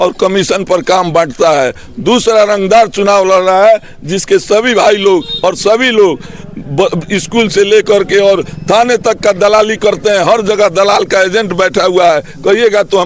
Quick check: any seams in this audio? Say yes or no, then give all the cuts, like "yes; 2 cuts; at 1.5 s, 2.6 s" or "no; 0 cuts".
no; 0 cuts